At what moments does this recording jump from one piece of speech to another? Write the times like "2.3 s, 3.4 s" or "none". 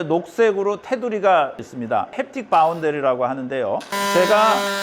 2.0 s, 3.9 s